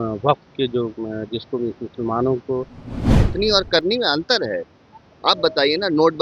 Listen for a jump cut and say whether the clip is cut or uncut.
cut